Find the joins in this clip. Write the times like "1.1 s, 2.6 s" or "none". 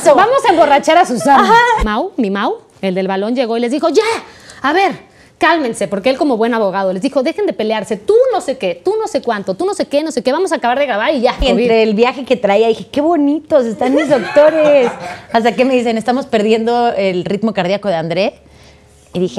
1.9 s, 11.4 s